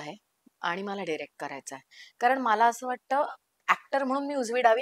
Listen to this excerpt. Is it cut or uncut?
uncut